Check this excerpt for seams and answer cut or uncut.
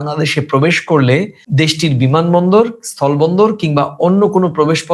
uncut